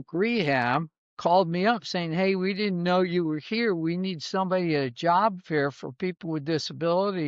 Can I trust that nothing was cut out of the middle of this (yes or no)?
yes